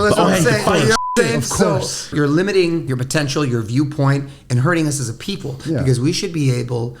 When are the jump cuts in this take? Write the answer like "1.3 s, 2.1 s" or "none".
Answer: 2.1 s, 2.9 s

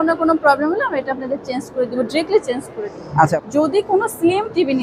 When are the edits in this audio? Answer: 3.4 s

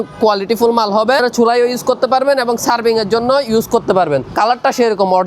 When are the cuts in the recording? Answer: 1.2 s, 4.3 s

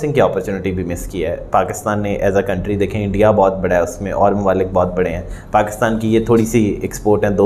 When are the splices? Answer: none

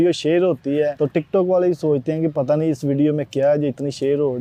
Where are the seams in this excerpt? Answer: 0.9 s

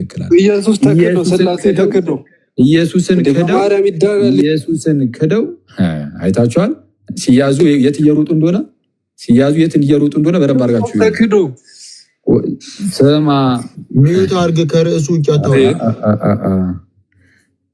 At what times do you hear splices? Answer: none

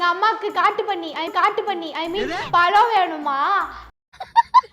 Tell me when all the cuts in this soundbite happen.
1.2 s

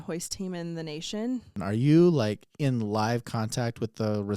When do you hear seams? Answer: 1.5 s

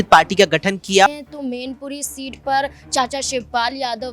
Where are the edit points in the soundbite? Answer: 1.1 s

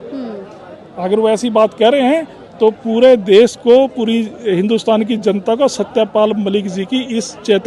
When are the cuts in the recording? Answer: none

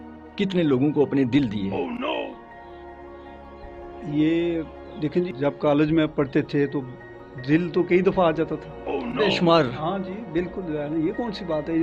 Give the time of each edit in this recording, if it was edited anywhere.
5.3 s

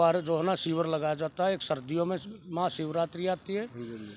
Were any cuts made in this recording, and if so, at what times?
none

